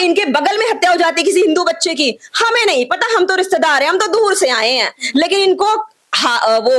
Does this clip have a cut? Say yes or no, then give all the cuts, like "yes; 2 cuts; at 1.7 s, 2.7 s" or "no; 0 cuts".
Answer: no; 0 cuts